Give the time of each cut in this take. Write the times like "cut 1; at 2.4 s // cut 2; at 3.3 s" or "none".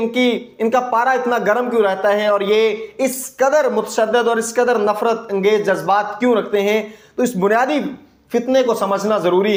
none